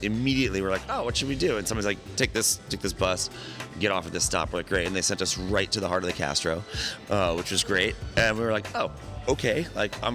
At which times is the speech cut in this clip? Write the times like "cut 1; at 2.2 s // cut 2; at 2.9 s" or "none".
none